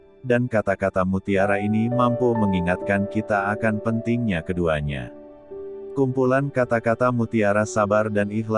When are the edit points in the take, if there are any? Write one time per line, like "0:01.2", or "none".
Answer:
0:05.7